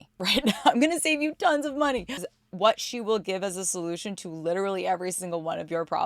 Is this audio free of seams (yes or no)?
no